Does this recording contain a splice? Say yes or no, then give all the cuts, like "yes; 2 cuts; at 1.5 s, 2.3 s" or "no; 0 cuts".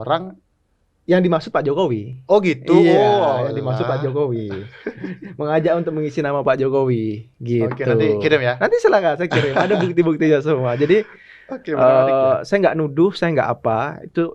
no; 0 cuts